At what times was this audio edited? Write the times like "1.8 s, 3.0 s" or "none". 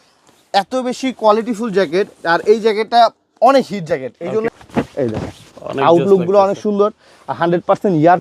4.5 s